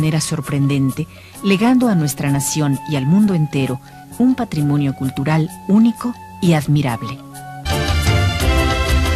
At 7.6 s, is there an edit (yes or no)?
no